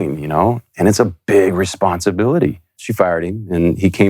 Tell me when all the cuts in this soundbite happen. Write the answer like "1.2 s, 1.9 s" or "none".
2.8 s